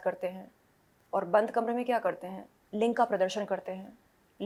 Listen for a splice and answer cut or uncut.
uncut